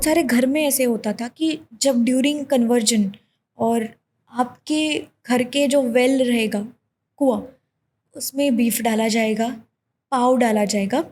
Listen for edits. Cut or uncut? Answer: uncut